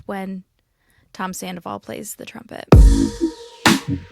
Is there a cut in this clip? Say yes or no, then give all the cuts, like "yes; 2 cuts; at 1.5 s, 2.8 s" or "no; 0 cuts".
yes; 1 cut; at 2.6 s